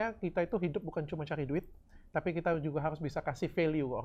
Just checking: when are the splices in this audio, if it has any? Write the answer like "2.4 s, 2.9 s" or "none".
none